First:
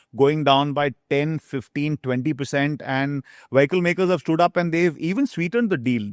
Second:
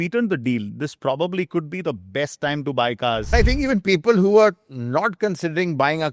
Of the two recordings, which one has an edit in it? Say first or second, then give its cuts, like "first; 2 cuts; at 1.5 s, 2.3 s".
second; 1 cut; at 3.3 s